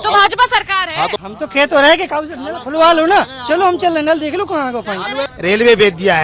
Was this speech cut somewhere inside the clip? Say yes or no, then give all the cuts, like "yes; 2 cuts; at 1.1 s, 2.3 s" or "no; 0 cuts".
yes; 2 cuts; at 1.2 s, 5.3 s